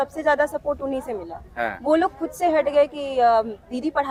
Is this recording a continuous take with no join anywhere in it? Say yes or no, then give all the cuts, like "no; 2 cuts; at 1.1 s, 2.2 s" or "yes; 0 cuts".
yes; 0 cuts